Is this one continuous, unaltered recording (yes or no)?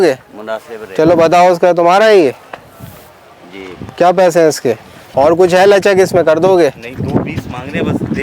no